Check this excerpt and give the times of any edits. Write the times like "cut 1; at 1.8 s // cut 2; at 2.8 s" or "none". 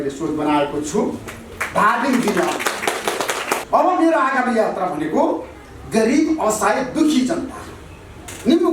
cut 1; at 3.6 s